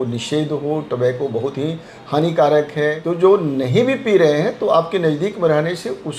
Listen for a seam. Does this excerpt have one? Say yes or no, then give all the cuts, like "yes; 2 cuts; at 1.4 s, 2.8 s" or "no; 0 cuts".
yes; 1 cut; at 3.0 s